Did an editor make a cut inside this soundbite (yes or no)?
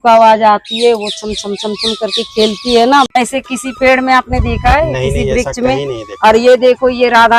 yes